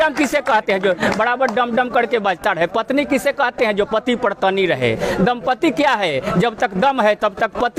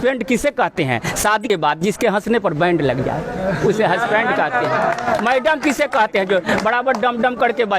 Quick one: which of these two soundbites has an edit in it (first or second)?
second